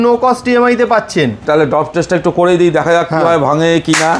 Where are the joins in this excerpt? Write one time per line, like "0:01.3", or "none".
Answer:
0:01.4